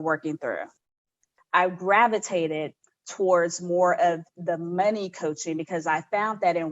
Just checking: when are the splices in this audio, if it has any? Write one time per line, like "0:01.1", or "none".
0:01.2